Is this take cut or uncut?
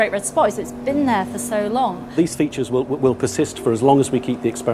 cut